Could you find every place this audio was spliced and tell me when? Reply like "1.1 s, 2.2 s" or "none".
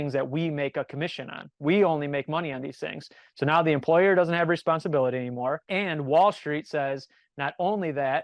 5.6 s